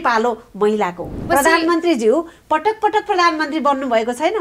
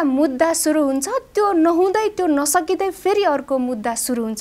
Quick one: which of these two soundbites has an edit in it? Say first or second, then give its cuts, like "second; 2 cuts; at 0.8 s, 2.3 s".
first; 1 cut; at 1.1 s